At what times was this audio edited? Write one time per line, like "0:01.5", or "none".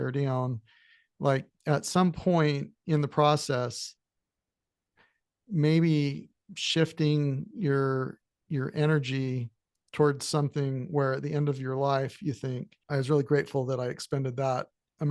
0:12.7